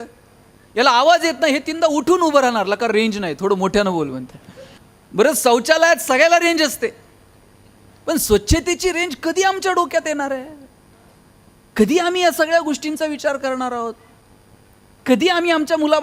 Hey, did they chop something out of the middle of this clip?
no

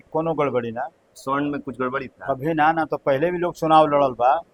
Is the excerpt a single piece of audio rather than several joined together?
yes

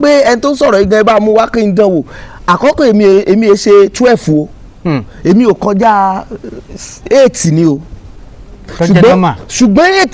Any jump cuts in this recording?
no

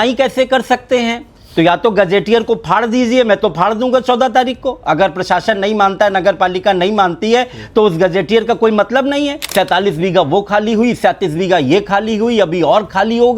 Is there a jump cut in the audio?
yes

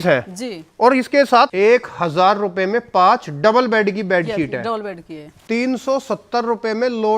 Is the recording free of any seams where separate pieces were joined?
no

